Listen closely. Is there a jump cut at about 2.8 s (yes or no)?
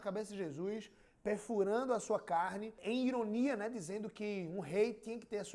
yes